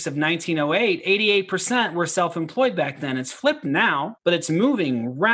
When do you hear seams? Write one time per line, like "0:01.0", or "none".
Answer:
0:04.1